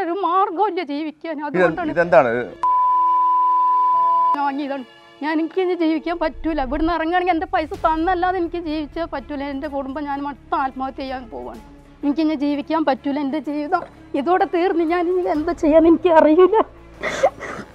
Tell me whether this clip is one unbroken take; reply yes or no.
no